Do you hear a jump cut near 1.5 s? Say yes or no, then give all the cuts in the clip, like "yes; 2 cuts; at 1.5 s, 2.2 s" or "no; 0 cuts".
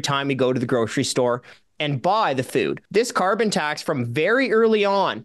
no; 1 cut; at 2.8 s